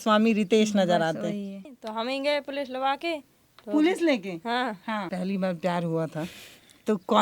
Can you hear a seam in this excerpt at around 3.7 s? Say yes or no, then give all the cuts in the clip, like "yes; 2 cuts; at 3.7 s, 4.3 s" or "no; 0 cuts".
no; 2 cuts; at 1.8 s, 5.1 s